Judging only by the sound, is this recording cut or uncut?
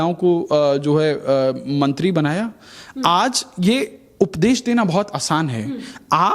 uncut